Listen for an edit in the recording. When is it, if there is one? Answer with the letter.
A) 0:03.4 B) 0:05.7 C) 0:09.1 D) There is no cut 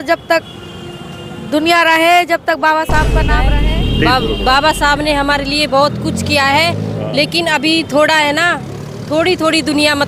A